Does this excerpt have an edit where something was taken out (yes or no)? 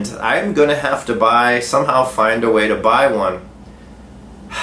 no